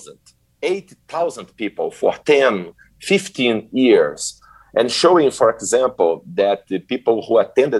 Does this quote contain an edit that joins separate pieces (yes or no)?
no